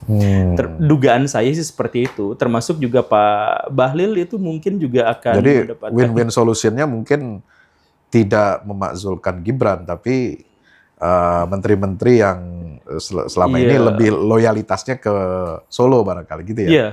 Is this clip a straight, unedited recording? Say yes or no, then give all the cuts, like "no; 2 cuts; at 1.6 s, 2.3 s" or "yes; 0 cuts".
yes; 0 cuts